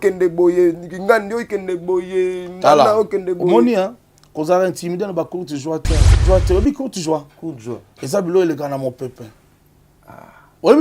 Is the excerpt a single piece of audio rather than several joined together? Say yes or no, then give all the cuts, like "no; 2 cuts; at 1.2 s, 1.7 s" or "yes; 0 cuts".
no; 1 cut; at 6.1 s